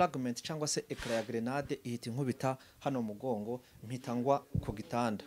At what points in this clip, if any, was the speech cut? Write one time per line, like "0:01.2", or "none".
none